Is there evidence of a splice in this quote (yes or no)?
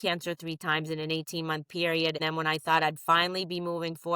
yes